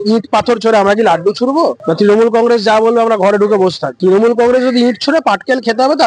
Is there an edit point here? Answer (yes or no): no